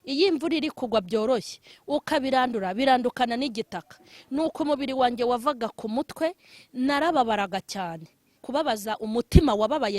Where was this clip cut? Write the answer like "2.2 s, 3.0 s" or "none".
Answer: 8.4 s